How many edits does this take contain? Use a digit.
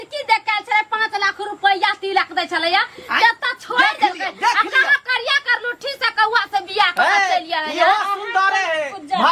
0